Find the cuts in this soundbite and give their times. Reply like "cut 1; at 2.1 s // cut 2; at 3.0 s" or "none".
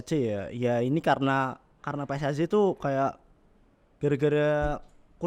none